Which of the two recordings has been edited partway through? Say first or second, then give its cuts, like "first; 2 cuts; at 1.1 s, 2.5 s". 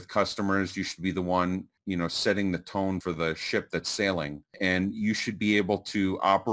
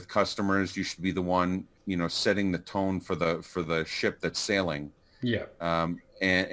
first; 2 cuts; at 3.0 s, 4.5 s